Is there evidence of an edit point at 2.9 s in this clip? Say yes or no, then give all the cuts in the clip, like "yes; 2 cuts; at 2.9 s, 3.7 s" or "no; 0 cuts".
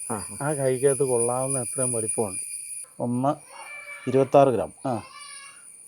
yes; 1 cut; at 2.9 s